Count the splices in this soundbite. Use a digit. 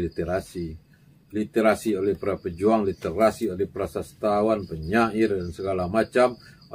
0